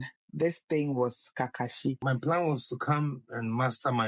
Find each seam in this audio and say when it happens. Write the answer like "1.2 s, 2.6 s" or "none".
2.0 s